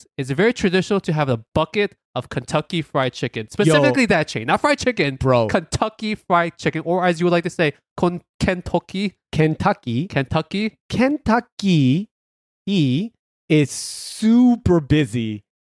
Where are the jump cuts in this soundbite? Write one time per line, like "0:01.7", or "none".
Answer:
none